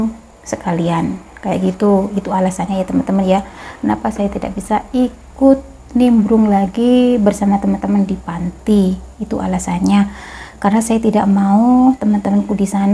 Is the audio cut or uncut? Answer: uncut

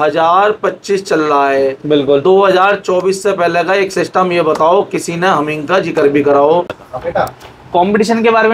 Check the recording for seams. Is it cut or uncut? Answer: cut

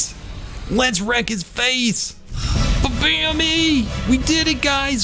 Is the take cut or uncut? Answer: cut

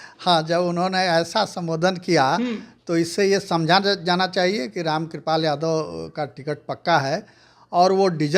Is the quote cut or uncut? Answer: uncut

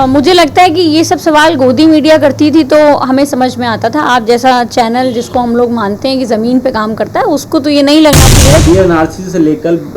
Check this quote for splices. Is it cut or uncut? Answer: cut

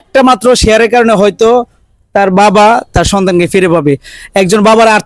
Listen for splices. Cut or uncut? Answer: uncut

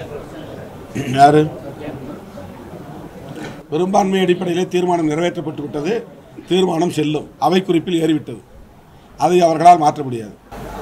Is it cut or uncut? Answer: cut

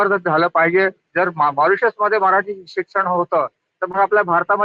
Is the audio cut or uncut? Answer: cut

